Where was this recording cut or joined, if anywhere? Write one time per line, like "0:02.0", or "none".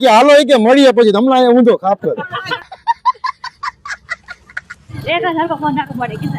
0:02.6
0:04.9

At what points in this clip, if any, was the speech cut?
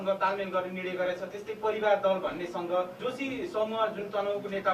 0:03.0

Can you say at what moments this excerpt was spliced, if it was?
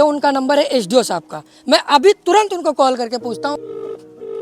none

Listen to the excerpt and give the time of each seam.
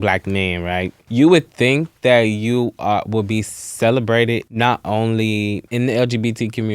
0:01.0
0:04.5
0:05.6

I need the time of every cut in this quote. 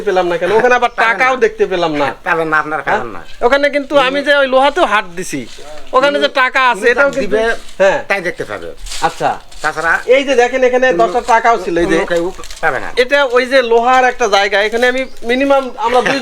none

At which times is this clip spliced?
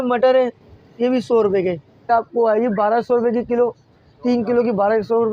0:01.8

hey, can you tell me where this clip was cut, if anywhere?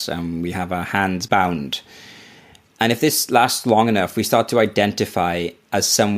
0:01.2

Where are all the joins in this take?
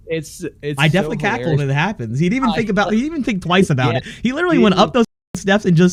none

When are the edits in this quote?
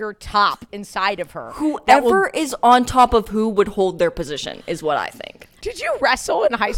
0:05.6

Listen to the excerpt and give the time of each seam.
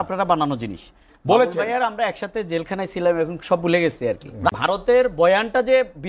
0:04.5

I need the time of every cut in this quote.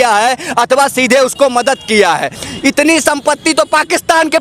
0:02.4

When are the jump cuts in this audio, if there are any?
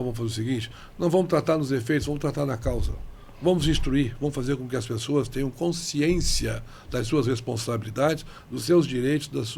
none

